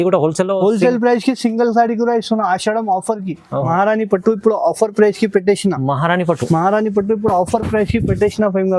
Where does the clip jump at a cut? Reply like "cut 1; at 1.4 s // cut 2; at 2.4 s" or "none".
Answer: cut 1; at 3.7 s